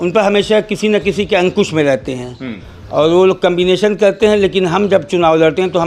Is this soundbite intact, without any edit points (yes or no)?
yes